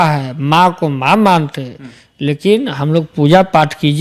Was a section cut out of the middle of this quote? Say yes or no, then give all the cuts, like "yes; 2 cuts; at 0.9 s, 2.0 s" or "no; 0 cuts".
no; 0 cuts